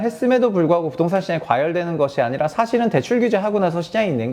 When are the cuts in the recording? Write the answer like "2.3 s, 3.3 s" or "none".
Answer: none